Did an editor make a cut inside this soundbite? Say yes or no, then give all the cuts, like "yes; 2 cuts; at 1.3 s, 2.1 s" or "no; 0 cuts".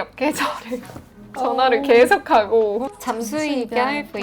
yes; 2 cuts; at 1.3 s, 2.9 s